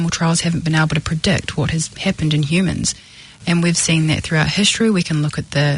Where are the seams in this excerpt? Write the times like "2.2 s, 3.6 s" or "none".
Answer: 1.9 s